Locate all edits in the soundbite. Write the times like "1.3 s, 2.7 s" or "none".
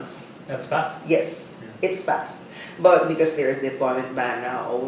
none